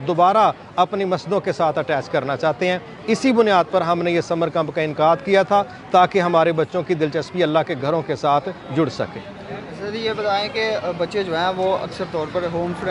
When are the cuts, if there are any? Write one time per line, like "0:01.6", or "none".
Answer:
none